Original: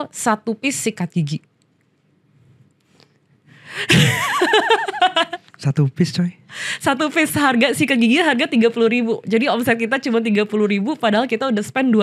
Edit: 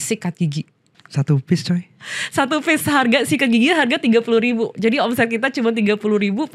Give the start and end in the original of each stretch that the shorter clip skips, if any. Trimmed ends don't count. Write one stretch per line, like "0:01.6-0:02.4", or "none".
0:01.7-0:05.5